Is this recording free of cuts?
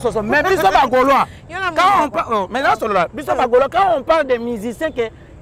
yes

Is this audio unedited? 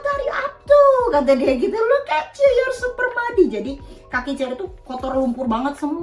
yes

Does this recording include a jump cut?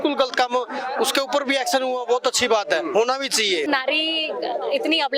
yes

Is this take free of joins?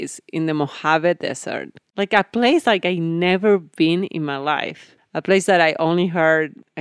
yes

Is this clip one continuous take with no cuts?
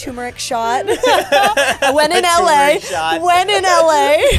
yes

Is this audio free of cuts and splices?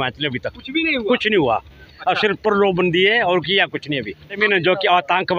no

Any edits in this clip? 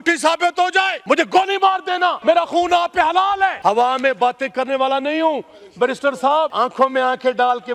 yes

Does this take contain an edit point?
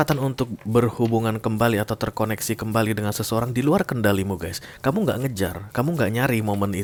no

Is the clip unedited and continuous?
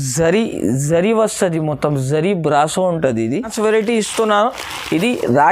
no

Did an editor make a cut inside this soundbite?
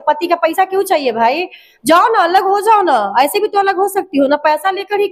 no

